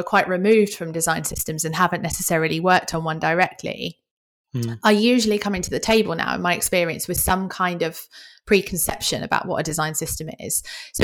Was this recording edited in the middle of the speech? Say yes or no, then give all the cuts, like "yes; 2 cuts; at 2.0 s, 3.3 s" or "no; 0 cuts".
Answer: no; 0 cuts